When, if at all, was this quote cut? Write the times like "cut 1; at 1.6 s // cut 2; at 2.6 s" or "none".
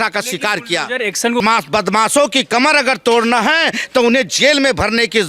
cut 1; at 1.4 s